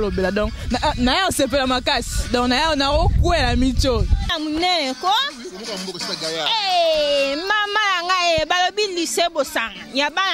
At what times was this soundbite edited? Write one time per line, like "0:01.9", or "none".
0:04.3